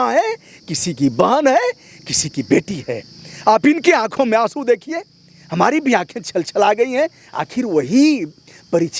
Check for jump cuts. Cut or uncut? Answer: uncut